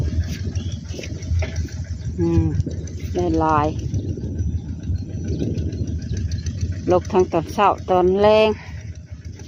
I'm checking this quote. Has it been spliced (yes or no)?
no